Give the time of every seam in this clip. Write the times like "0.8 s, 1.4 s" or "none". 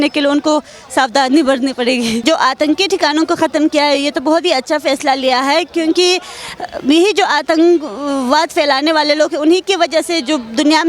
2.2 s